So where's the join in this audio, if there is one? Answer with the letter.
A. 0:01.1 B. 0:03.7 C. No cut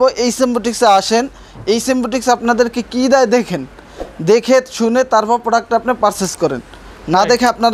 C